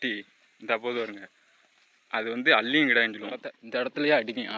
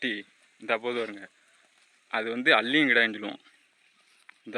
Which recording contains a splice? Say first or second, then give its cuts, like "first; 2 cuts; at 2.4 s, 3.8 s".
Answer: first; 1 cut; at 3.6 s